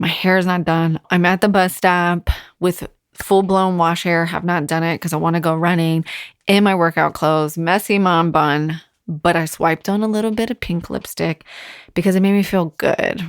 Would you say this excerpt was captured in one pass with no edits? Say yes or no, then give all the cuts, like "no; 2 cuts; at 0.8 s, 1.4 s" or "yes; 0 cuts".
no; 1 cut; at 1.0 s